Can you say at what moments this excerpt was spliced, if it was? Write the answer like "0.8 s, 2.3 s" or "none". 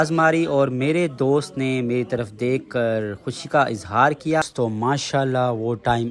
4.4 s